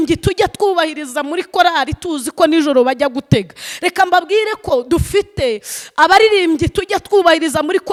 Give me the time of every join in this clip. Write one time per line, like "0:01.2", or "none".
none